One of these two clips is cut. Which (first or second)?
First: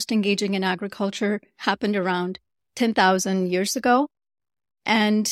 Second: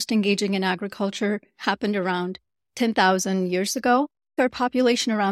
second